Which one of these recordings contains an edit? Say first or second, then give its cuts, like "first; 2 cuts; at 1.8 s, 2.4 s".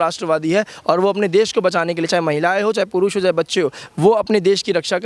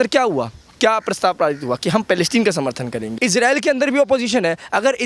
second; 1 cut; at 3.1 s